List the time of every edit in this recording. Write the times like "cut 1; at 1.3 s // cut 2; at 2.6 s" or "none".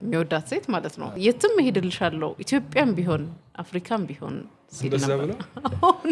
cut 1; at 1.1 s